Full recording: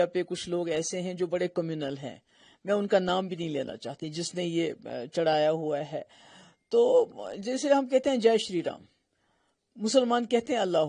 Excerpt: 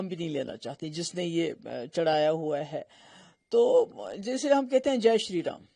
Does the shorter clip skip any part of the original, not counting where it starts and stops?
no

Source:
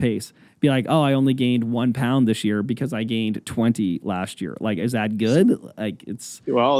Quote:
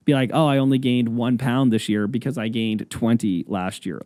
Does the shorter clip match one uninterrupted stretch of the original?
yes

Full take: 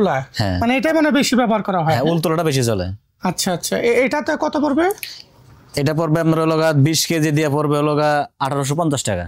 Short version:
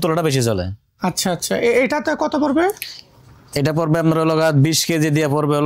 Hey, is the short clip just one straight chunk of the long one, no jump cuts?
yes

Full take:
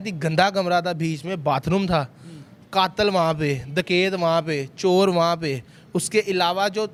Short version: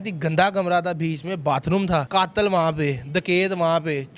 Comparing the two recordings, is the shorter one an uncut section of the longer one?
no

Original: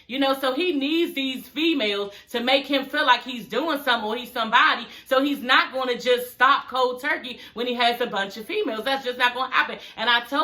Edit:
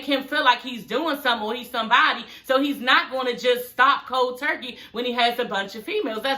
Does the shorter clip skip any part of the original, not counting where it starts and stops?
no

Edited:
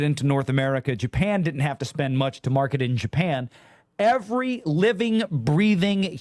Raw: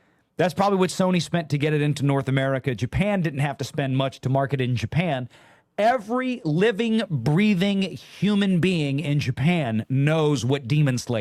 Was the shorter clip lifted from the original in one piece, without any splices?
yes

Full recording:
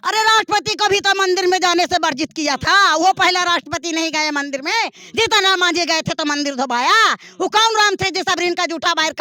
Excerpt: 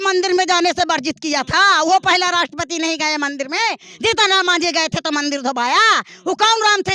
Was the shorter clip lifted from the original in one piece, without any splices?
yes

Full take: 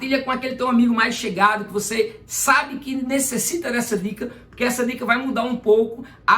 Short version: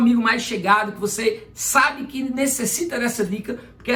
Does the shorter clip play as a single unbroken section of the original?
yes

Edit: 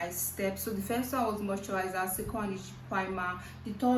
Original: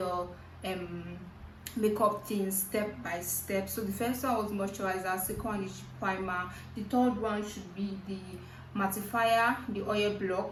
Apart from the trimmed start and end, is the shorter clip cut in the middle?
no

